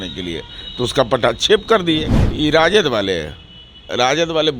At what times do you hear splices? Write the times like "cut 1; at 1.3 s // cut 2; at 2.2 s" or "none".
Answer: cut 1; at 2.2 s